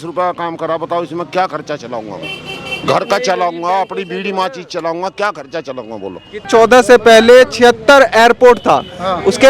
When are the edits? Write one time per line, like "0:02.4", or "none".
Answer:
0:06.5